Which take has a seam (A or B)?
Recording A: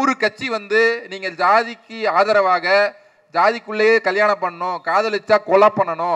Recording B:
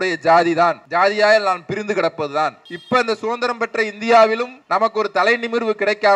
B